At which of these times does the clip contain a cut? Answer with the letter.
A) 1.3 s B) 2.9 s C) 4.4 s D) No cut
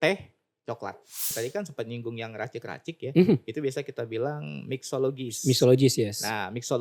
A